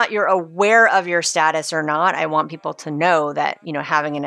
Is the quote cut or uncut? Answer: uncut